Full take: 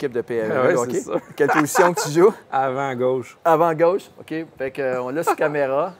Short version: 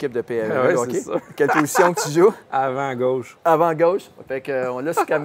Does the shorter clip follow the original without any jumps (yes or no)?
no